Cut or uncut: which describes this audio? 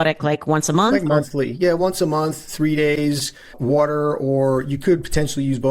uncut